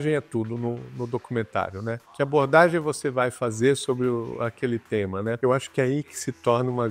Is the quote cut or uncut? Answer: cut